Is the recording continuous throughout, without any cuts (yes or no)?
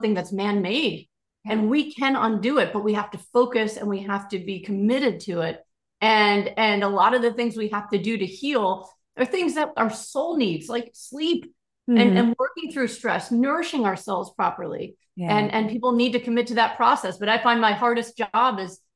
yes